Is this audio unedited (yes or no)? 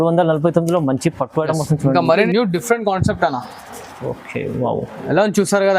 no